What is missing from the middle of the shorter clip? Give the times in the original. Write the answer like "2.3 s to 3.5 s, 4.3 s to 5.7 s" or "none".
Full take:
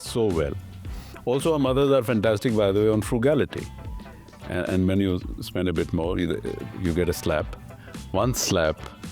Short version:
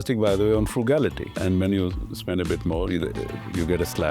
3.7 s to 4.6 s